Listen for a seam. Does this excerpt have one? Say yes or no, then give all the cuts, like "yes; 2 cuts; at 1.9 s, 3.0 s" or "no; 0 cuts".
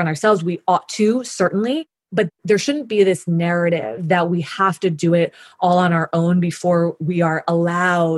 yes; 1 cut; at 2.3 s